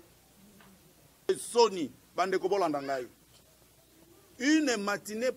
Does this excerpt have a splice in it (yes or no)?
yes